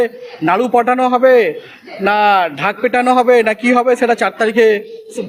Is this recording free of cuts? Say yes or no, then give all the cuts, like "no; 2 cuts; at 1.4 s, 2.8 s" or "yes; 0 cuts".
yes; 0 cuts